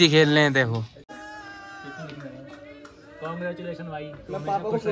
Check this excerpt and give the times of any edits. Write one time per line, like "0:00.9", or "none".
0:01.1